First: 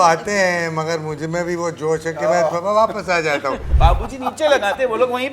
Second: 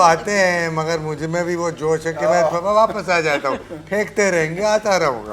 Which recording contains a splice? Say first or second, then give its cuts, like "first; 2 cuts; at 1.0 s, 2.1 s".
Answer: first; 1 cut; at 3.7 s